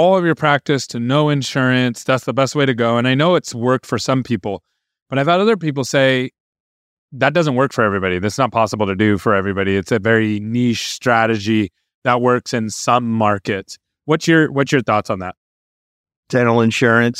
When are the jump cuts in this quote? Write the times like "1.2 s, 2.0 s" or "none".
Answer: 15.7 s